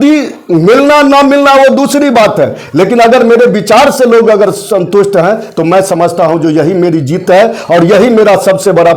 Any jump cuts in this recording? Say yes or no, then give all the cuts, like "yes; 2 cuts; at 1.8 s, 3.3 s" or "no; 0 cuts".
no; 0 cuts